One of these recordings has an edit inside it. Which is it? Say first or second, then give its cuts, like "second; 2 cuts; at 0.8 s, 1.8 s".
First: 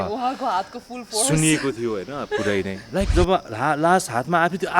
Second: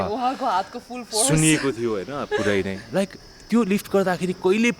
first; 1 cut; at 3.1 s